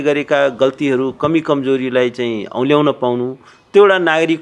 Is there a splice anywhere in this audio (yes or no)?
no